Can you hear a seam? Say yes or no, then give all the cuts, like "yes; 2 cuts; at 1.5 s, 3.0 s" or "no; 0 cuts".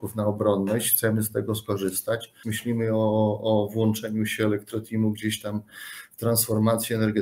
yes; 1 cut; at 2.5 s